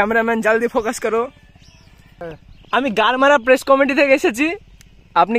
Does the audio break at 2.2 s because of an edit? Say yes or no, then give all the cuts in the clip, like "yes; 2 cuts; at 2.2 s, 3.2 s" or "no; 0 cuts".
yes; 1 cut; at 2.2 s